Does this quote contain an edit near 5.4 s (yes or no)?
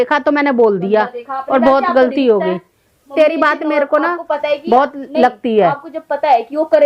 no